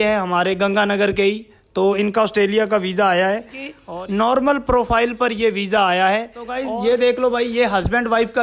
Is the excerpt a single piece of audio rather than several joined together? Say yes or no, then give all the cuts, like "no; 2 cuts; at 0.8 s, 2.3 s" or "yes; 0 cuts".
no; 2 cuts; at 3.8 s, 6.6 s